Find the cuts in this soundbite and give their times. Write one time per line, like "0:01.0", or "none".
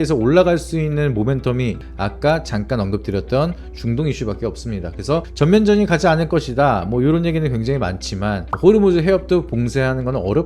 0:01.8